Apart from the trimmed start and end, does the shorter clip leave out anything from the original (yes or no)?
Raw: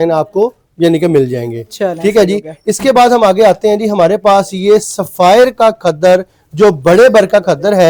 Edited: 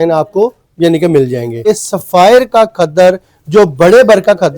yes